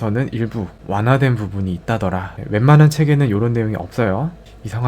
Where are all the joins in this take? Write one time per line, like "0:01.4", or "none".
0:02.3